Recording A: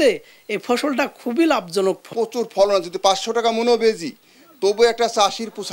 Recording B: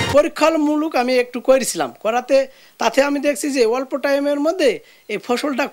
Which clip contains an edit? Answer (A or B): A